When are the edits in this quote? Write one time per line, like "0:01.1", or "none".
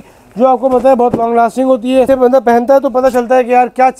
0:02.1